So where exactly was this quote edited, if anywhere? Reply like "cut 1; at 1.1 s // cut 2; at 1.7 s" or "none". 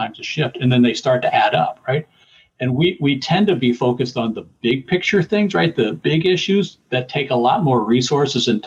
cut 1; at 6.0 s